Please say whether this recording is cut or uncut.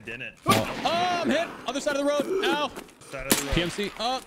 cut